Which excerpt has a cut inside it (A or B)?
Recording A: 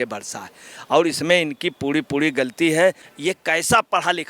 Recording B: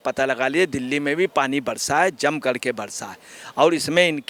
A